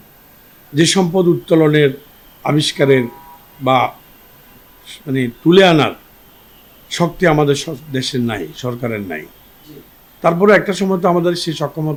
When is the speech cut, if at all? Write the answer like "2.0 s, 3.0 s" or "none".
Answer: none

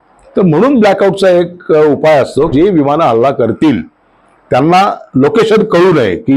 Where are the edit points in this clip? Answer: 2.5 s

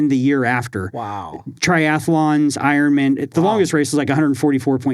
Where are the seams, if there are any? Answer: 3.3 s

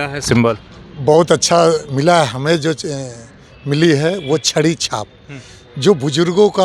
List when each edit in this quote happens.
none

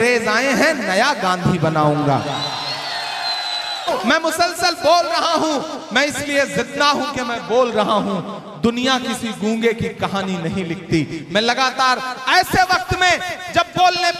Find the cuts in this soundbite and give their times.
3.8 s

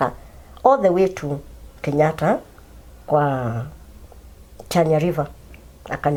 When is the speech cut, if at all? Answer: none

